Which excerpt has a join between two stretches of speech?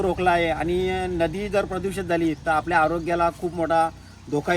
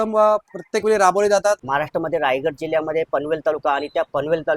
second; 1 cut; at 1.6 s

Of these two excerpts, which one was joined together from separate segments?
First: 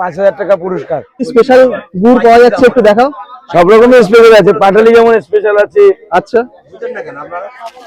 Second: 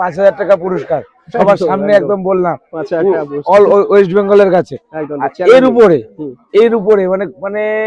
first; 1 cut; at 1.3 s

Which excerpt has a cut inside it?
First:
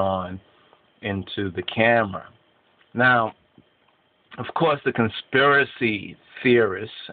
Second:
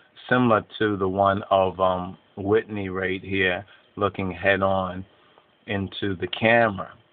first; 1 cut; at 5.9 s

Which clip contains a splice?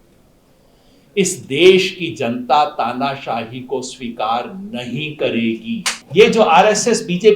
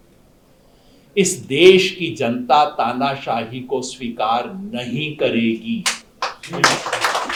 first; 1 cut; at 6.0 s

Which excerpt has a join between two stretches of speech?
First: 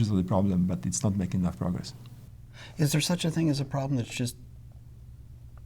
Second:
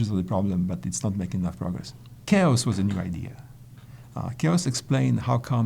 second; 1 cut; at 2.2 s

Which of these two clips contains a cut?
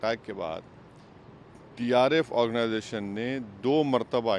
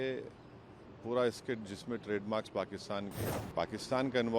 second; 1 cut; at 3.2 s

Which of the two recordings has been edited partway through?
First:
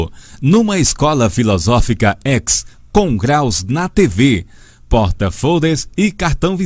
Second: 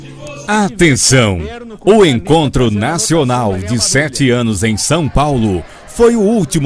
second; 1 cut; at 3.0 s

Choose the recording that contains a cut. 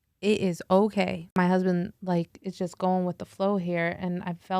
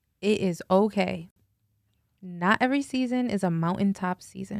first; 1 cut; at 1.4 s

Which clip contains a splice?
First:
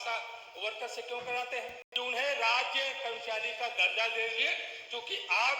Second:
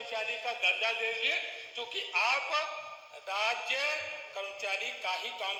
first; 1 cut; at 1.8 s

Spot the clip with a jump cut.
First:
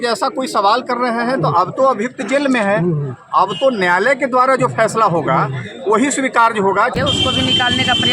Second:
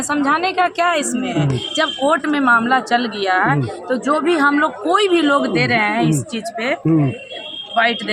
first; 1 cut; at 6.9 s

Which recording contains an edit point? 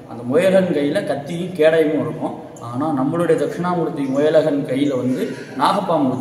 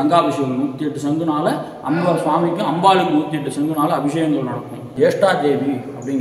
second; 1 cut; at 4.9 s

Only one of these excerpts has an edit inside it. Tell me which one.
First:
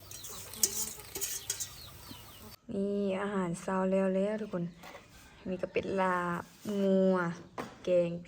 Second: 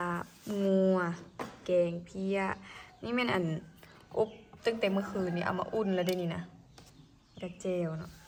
first; 1 cut; at 2.6 s

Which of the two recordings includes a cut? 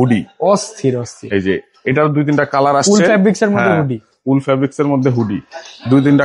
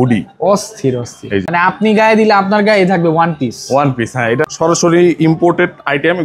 second; 2 cuts; at 1.4 s, 4.5 s

